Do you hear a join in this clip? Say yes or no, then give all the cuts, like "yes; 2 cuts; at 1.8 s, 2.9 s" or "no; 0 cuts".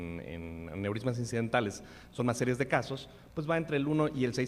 no; 0 cuts